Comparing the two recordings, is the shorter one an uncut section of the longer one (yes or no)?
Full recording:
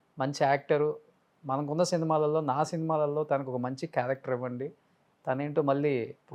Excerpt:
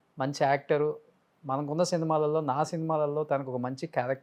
yes